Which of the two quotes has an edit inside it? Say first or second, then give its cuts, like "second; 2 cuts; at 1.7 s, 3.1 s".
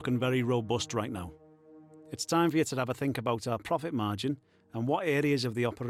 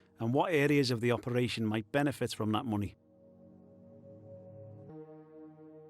second; 2 cuts; at 3.1 s, 4.9 s